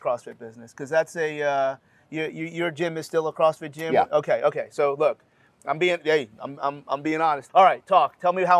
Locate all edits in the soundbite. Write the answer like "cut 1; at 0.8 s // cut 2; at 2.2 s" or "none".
cut 1; at 7.5 s